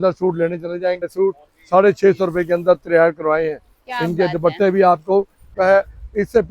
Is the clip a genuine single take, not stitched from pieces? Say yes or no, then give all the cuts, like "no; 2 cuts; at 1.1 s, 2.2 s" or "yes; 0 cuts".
no; 2 cuts; at 1.0 s, 5.5 s